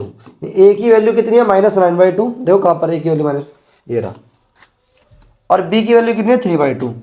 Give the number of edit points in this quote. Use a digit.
0